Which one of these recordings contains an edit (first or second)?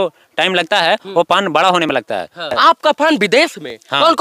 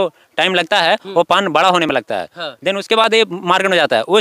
first